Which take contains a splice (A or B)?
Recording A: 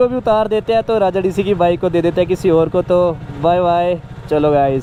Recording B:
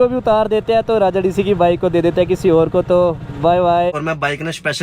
B